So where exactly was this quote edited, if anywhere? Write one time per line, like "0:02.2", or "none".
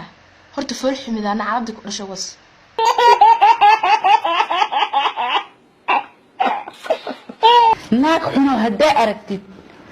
0:03.0
0:07.8